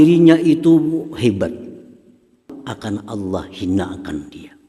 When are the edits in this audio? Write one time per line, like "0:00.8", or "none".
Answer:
0:02.5